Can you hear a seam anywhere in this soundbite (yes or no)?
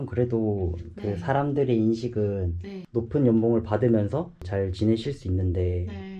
yes